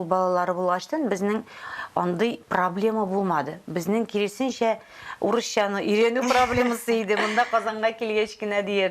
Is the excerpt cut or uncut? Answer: uncut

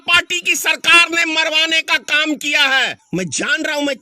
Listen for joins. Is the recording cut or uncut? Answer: cut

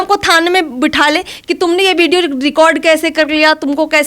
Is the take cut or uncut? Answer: uncut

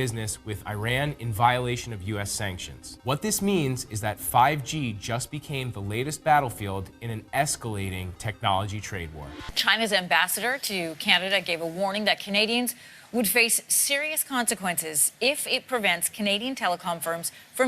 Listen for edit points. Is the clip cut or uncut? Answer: cut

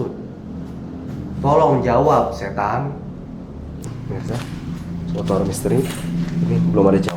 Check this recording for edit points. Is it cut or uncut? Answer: cut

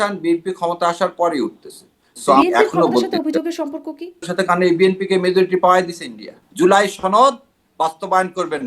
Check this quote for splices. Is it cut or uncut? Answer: cut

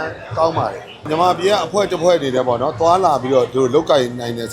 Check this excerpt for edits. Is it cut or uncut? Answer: cut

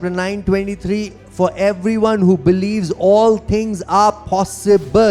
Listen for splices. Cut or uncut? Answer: uncut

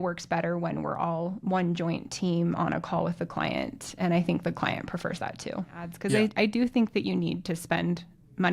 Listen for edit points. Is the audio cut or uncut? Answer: cut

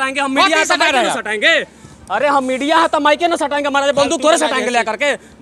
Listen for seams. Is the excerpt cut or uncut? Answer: uncut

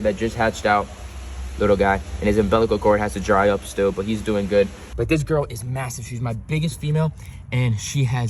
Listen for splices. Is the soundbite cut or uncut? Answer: cut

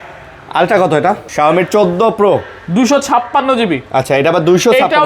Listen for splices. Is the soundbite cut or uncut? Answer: cut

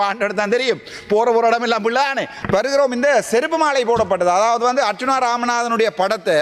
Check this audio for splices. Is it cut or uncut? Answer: cut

